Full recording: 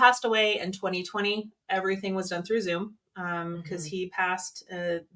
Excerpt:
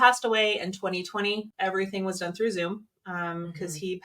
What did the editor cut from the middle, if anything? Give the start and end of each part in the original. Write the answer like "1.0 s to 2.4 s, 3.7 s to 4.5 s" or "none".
1.5 s to 1.6 s